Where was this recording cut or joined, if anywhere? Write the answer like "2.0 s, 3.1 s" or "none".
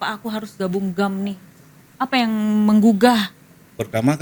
none